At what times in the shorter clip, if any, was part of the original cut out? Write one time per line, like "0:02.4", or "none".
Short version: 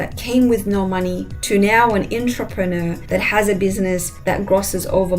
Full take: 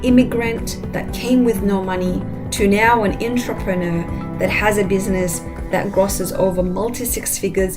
0:01.3
0:03.0
0:04.1